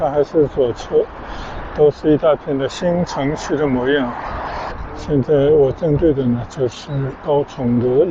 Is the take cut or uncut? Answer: cut